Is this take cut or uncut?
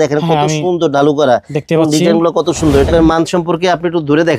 cut